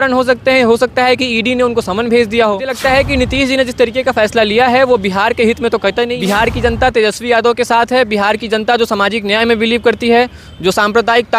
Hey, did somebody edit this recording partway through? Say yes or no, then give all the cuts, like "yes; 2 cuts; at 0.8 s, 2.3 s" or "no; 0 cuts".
yes; 2 cuts; at 2.8 s, 6.1 s